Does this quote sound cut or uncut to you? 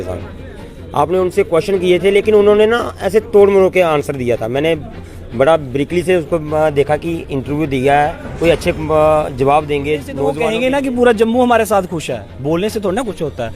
cut